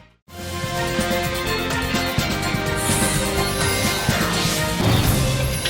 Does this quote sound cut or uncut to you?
uncut